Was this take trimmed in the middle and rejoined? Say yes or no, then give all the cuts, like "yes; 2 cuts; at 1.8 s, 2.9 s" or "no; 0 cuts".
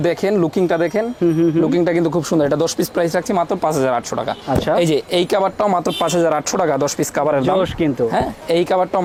no; 0 cuts